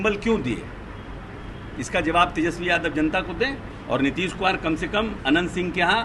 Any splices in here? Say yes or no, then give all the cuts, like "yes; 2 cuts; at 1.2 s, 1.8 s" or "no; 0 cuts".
yes; 1 cut; at 3.7 s